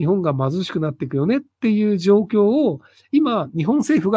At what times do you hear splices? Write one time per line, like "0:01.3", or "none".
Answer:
none